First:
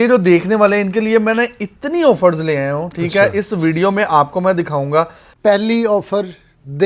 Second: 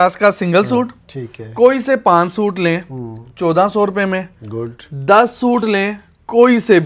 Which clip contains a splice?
first; 1 cut; at 5.2 s

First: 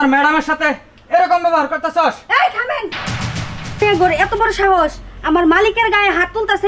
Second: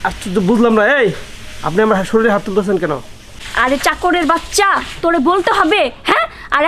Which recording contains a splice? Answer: first; 1 cut; at 3.8 s

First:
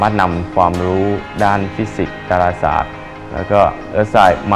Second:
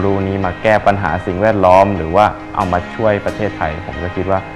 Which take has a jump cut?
second; 1 cut; at 2.5 s

